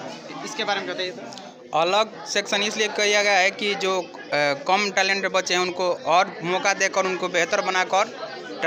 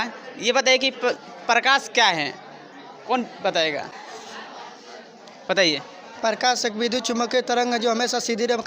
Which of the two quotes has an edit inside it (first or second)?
second